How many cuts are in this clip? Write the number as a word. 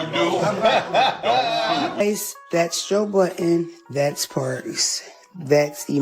one